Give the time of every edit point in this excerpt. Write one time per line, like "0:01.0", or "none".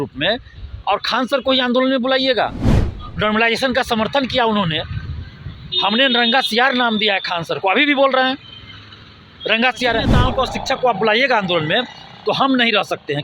0:10.1